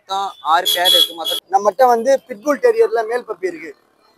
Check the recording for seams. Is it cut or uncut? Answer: cut